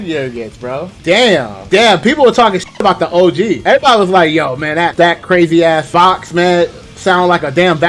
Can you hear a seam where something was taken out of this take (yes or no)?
yes